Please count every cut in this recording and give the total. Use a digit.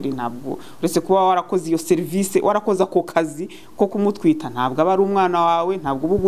0